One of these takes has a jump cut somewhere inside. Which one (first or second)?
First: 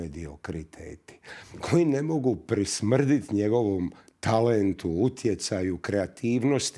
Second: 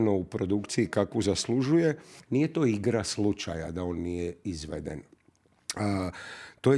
second